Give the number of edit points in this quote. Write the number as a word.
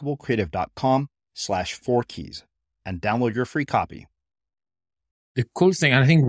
one